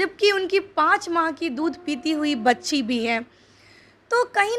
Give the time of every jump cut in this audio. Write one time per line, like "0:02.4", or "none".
none